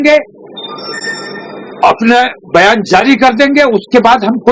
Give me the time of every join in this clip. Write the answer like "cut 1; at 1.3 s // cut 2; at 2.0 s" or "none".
none